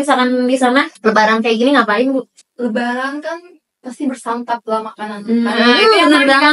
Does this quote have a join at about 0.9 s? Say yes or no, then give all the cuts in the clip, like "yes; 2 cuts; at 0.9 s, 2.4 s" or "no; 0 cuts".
yes; 2 cuts; at 0.9 s, 2.4 s